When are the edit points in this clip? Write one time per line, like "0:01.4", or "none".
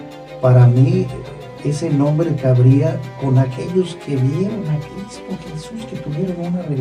none